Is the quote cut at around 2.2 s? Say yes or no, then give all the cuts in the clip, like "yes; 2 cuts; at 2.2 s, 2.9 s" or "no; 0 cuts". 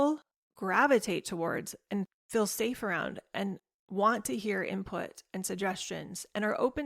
yes; 1 cut; at 2.2 s